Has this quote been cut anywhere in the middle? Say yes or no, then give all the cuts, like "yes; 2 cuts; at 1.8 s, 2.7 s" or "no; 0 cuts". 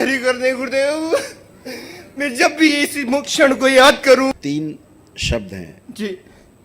yes; 1 cut; at 4.4 s